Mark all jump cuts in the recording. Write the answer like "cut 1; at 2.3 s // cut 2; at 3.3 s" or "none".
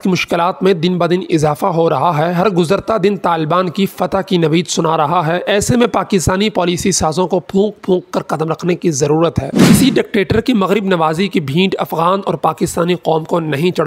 cut 1; at 9.6 s